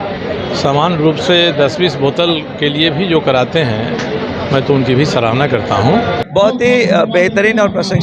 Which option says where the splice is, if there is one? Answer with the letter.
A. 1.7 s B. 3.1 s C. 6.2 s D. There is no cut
C